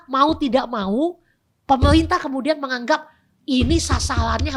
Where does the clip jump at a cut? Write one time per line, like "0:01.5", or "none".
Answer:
none